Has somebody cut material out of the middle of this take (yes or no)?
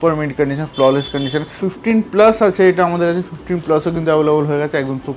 yes